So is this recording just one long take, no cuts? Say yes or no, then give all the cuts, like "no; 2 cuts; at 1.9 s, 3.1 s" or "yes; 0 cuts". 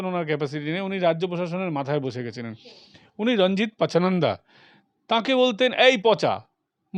yes; 0 cuts